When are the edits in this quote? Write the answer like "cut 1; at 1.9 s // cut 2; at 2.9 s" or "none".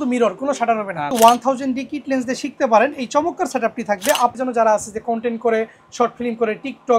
cut 1; at 1.1 s // cut 2; at 4.3 s